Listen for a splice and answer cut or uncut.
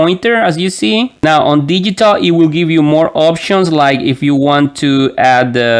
cut